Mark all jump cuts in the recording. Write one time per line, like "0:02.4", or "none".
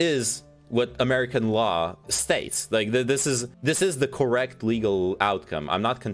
0:02.1
0:03.5